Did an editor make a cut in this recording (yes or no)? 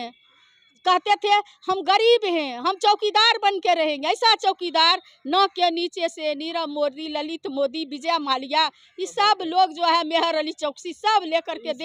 no